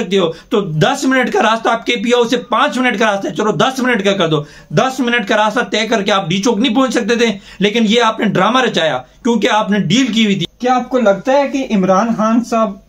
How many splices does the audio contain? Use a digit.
1